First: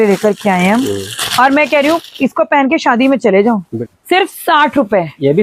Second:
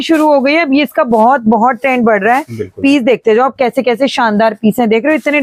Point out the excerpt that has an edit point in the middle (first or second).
first